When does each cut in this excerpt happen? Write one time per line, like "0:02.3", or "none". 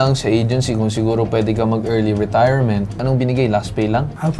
0:03.0

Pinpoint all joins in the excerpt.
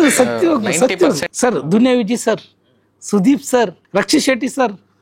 0:01.3
0:03.8

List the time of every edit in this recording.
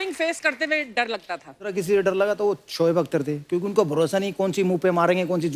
0:01.7

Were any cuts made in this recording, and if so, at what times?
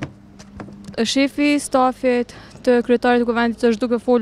0:00.9

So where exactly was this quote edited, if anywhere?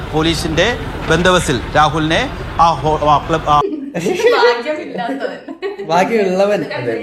0:03.6

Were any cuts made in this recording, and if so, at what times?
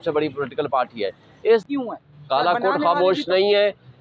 0:01.6

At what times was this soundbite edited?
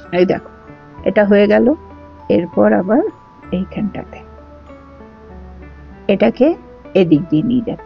0:04.1
0:06.1

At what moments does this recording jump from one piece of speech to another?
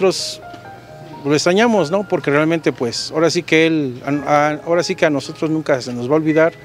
none

